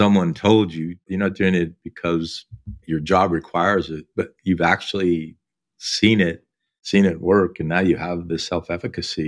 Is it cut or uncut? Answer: cut